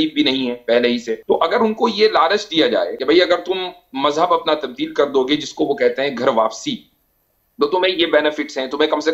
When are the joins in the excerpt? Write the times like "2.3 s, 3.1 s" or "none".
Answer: 1.2 s, 2.9 s